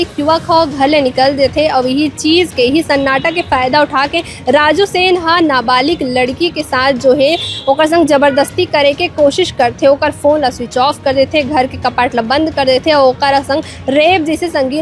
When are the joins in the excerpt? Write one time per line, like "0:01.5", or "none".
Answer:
none